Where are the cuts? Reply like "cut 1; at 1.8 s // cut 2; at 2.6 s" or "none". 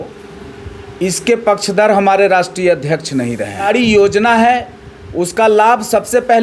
cut 1; at 3.6 s